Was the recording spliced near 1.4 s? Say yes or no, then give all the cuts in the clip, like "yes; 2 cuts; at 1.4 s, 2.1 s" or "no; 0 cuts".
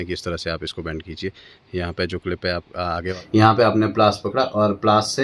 no; 1 cut; at 3.2 s